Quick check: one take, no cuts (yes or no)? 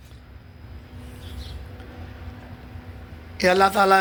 yes